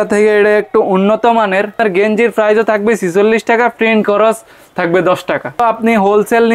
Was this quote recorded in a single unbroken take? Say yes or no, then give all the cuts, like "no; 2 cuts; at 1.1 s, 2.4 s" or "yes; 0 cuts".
no; 2 cuts; at 1.8 s, 5.6 s